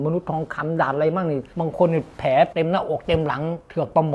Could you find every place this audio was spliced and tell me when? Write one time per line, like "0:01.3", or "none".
0:01.5
0:02.5

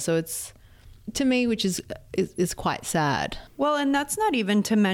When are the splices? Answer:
0:01.1

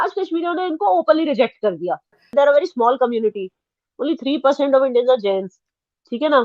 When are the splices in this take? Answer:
0:02.3

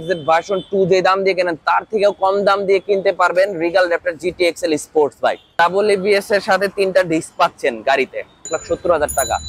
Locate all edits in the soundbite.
0:05.5
0:08.5

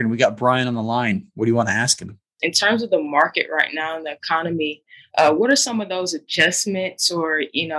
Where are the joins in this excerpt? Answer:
0:02.4

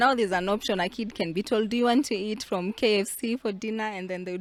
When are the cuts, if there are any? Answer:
none

